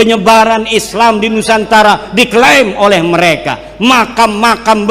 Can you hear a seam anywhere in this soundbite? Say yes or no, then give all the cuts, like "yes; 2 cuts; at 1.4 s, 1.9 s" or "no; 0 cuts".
no; 0 cuts